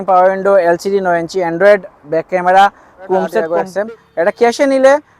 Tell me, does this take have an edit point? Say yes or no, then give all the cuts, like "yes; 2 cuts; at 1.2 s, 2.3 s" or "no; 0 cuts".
yes; 1 cut; at 3.5 s